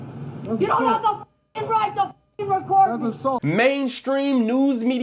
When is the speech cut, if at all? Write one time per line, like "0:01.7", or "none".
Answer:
0:03.4